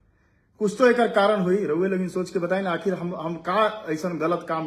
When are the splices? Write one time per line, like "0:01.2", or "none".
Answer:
none